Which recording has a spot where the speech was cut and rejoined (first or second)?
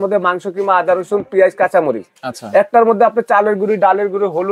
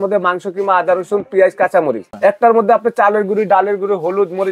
second